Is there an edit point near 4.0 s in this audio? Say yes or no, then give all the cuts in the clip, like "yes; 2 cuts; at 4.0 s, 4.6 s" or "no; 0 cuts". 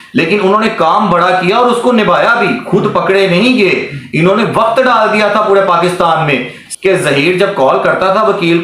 no; 1 cut; at 6.6 s